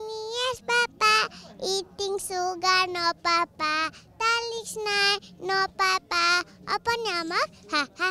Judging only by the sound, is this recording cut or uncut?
uncut